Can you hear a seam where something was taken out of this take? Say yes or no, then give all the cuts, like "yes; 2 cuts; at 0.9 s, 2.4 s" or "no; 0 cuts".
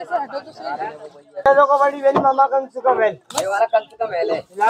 yes; 1 cut; at 1.5 s